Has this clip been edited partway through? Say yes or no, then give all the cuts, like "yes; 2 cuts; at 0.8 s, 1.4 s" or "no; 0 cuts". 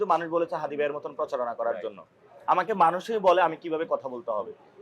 no; 0 cuts